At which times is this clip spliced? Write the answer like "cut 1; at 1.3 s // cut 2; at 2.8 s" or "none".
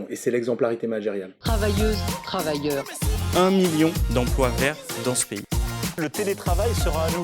cut 1; at 1.3 s